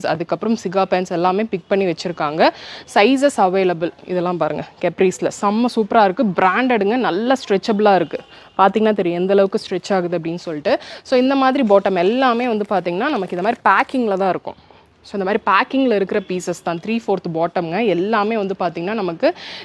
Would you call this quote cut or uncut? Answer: uncut